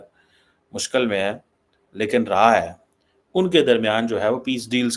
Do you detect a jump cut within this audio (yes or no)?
no